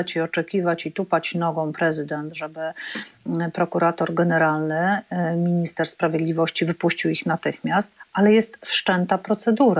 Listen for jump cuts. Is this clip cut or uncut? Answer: uncut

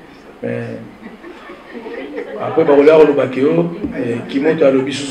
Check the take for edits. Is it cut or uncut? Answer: uncut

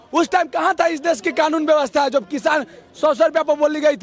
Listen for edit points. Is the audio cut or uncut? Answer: uncut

